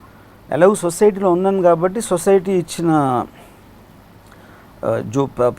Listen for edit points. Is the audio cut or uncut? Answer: uncut